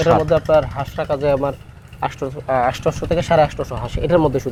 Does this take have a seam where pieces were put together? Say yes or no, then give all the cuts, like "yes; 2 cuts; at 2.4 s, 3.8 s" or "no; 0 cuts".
no; 0 cuts